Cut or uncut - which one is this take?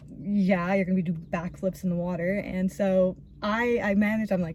uncut